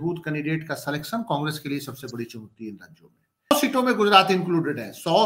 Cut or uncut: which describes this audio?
cut